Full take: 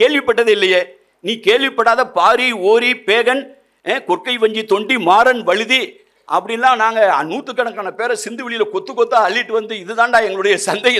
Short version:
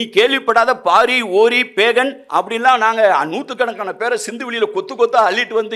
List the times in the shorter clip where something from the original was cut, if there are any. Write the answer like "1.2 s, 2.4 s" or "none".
2.2 s